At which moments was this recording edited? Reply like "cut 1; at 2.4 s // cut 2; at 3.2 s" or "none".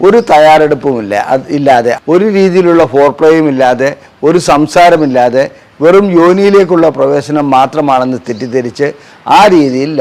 none